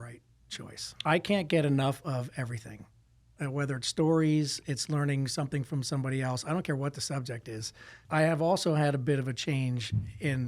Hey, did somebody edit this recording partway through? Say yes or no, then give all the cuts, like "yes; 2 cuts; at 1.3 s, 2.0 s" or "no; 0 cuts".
yes; 2 cuts; at 0.9 s, 8.0 s